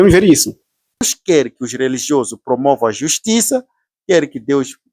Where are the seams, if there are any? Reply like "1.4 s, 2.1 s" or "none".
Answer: 1.1 s